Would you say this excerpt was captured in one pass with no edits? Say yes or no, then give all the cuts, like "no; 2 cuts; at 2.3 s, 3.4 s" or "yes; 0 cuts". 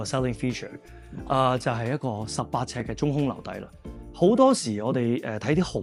yes; 0 cuts